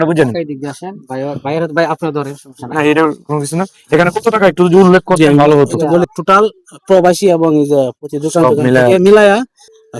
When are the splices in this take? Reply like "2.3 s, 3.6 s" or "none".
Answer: 6.0 s